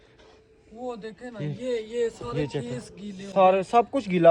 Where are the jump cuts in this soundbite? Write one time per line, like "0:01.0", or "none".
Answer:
none

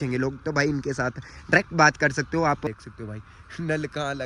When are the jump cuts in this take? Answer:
0:02.6

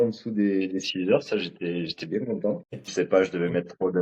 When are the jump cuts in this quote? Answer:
0:02.9

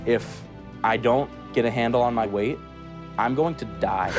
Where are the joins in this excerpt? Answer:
none

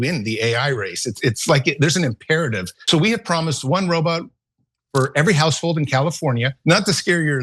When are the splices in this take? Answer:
0:02.8
0:06.5

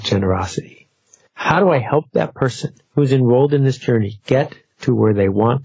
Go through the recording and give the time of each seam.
none

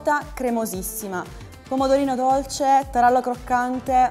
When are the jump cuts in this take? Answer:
none

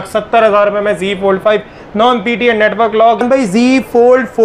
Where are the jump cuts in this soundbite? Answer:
0:03.2

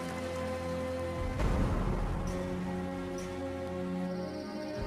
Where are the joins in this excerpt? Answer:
0:01.6

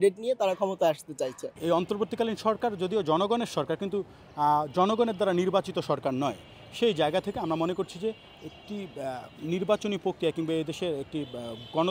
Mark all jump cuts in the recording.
0:01.5

